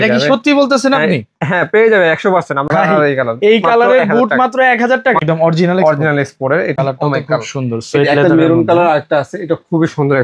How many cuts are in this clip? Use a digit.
3